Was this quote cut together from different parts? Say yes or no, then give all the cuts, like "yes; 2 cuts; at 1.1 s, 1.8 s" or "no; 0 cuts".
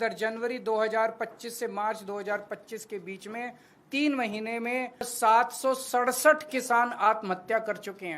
yes; 1 cut; at 5.1 s